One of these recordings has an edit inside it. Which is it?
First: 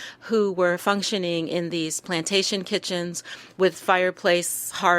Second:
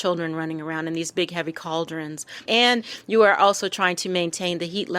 second; 1 cut; at 2.4 s

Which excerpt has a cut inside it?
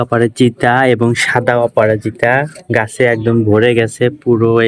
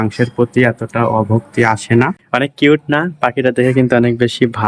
second; 1 cut; at 2.2 s

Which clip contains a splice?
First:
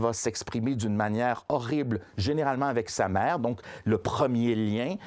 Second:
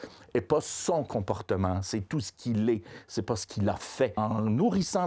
second; 1 cut; at 4.2 s

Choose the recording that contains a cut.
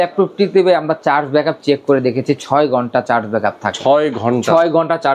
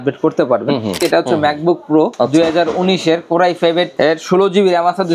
second; 3 cuts; at 1.0 s, 2.1 s, 3.9 s

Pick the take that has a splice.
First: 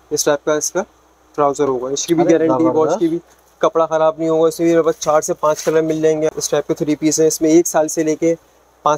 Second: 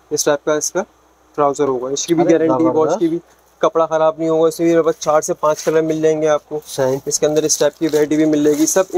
first; 1 cut; at 6.3 s

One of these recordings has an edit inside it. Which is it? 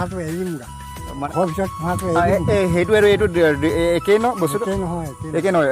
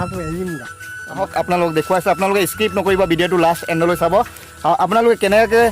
second; 1 cut; at 1.2 s

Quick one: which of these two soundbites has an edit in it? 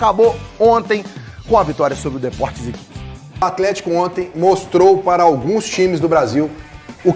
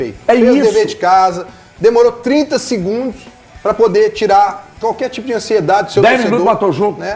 first; 1 cut; at 3.4 s

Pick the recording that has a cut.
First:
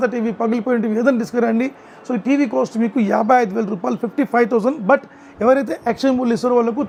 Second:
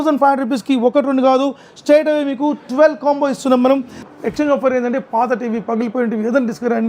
second; 1 cut; at 4.1 s

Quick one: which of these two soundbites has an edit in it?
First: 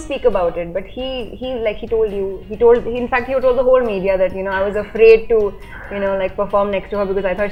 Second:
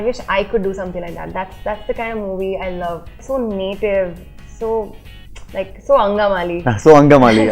second; 1 cut; at 3.2 s

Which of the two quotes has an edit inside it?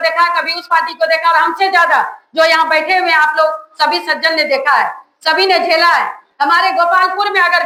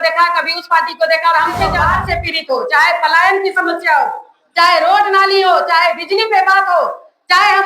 second; 1 cut; at 1.8 s

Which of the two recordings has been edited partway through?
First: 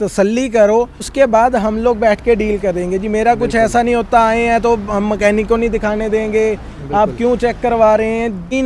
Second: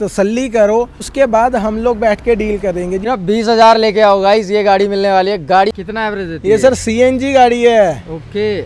second; 2 cuts; at 3.0 s, 5.7 s

